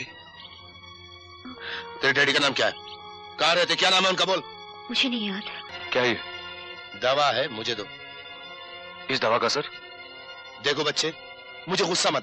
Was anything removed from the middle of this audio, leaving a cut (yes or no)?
yes